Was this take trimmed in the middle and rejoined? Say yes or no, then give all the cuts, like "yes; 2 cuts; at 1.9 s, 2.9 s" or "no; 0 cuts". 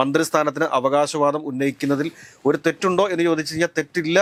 no; 0 cuts